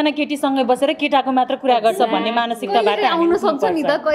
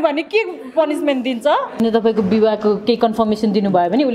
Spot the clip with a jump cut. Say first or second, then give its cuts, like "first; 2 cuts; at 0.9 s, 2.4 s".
second; 1 cut; at 1.8 s